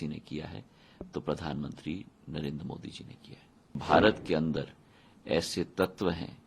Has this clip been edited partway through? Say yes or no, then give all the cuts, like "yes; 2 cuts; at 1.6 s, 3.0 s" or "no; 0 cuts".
yes; 1 cut; at 3.8 s